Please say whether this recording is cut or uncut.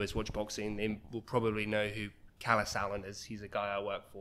uncut